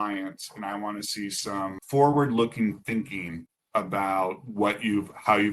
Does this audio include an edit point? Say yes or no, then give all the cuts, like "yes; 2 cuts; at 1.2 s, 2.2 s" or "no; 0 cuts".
yes; 1 cut; at 1.8 s